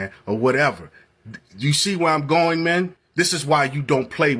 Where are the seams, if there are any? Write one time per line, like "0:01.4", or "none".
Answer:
0:03.0